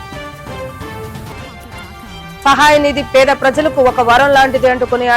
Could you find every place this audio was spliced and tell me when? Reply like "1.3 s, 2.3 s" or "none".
1.3 s